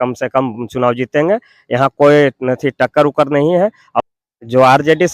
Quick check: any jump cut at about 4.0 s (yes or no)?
yes